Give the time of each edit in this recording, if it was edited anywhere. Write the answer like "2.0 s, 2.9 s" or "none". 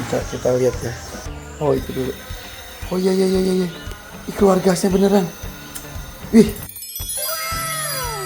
1.1 s